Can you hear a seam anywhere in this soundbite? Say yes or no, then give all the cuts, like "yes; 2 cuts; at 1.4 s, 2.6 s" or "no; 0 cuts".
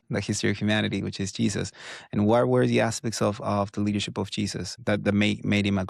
yes; 1 cut; at 4.7 s